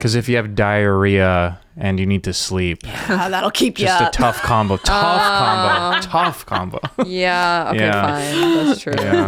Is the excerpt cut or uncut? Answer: uncut